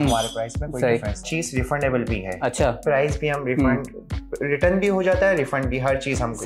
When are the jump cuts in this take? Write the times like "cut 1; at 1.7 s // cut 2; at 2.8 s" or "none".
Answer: cut 1; at 1.2 s